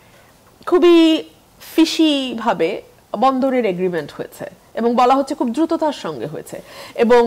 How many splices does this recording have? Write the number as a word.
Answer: zero